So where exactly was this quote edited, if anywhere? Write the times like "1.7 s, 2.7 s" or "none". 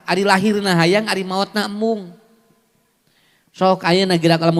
none